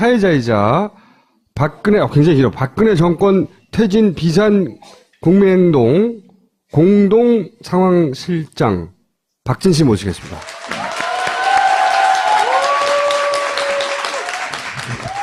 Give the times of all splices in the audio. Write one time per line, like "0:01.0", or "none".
none

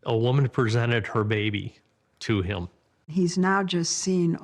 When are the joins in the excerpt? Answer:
0:03.1

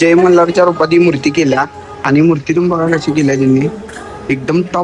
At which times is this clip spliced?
none

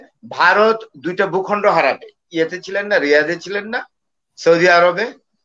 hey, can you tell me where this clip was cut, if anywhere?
0:02.2

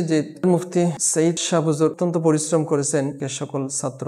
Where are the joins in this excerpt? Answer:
none

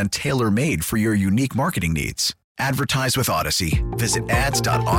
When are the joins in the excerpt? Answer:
none

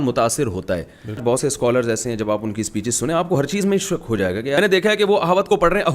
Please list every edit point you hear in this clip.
0:01.2
0:04.6

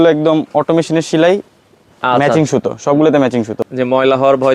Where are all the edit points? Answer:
0:03.6

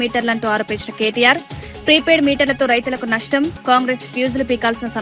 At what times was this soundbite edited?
none

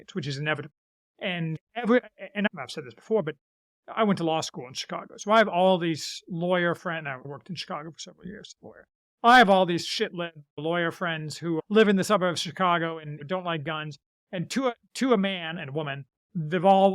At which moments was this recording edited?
0:01.6
0:02.5
0:10.6
0:11.6
0:13.2

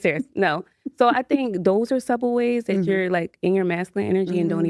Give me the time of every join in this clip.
none

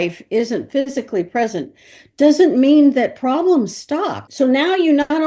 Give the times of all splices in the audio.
0:04.2

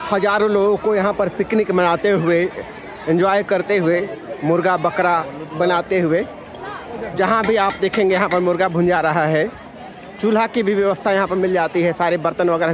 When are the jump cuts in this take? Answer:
none

